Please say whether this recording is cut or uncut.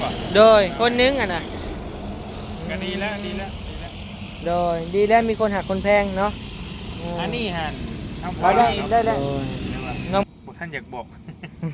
cut